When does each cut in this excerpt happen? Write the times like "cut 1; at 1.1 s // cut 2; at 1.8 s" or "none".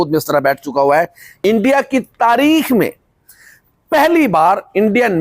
cut 1; at 1.2 s